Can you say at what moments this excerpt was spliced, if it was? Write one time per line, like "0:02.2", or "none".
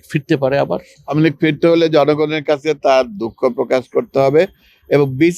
0:01.0